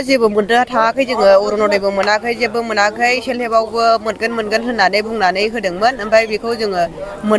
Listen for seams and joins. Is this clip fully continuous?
yes; 0 cuts

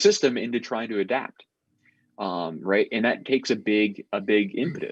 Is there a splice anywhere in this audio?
no; 0 cuts

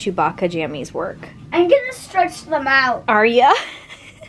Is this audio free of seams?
yes; 0 cuts

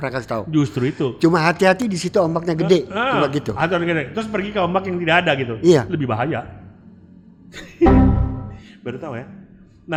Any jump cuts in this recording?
no; 0 cuts

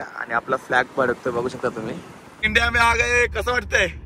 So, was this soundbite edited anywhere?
yes; 1 cut; at 2.4 s

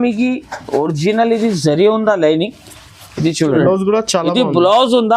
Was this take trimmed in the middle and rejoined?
yes; 1 cut; at 3.6 s

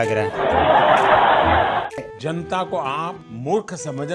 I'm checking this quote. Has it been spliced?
yes; 1 cut; at 3.3 s

